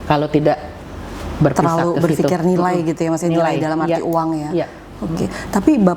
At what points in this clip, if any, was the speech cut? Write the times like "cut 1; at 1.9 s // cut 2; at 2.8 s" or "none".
none